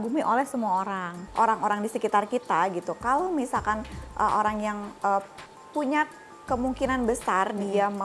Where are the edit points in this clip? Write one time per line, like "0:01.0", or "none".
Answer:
0:01.1